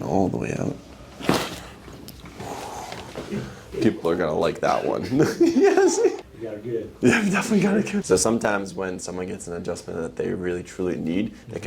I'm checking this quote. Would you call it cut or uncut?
cut